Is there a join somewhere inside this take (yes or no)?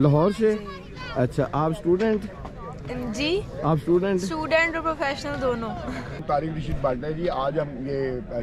yes